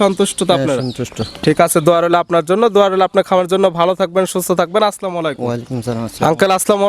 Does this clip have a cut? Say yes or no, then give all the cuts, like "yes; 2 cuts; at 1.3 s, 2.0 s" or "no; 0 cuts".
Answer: no; 0 cuts